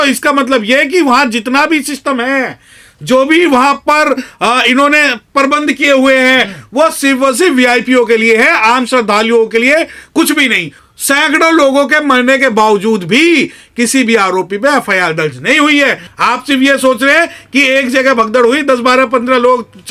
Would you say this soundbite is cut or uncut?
cut